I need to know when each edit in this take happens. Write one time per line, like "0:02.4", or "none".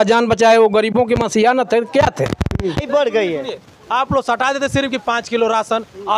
0:02.8